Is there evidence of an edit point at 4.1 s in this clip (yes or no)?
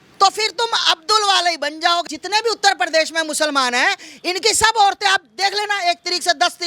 no